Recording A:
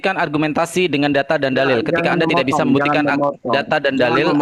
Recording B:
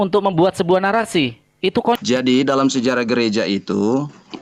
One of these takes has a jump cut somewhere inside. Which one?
B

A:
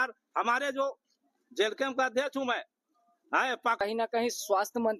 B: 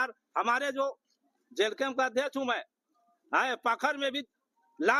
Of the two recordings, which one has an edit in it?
A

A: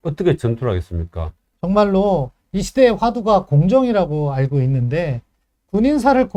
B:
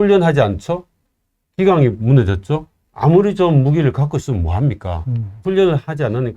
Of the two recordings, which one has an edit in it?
B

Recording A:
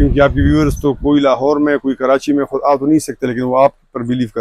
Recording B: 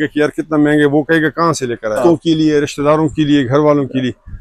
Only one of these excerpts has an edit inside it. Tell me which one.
B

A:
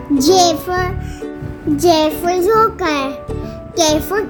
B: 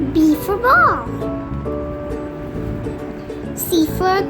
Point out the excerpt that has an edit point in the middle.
B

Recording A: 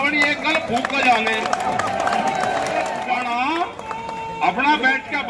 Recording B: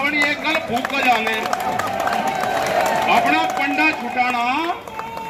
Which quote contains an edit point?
A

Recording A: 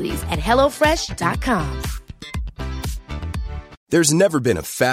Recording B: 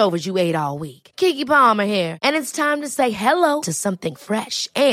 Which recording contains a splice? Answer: A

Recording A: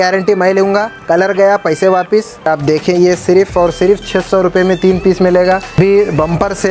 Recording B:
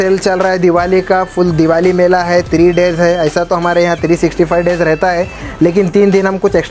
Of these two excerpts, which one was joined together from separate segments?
A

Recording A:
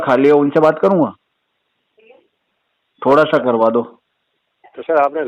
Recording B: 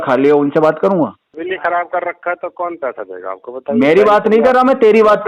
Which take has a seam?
B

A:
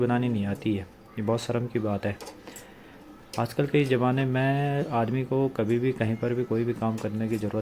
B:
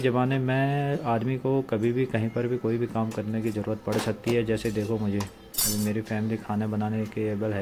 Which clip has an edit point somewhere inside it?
A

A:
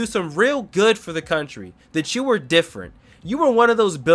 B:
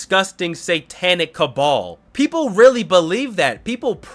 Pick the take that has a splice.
B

